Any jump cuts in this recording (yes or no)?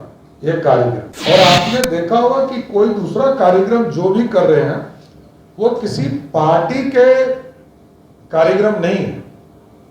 yes